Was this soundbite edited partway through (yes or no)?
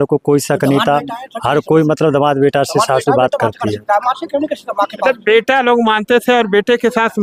no